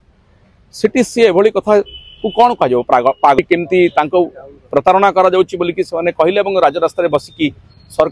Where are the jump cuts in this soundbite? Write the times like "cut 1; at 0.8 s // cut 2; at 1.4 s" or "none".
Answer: cut 1; at 3.4 s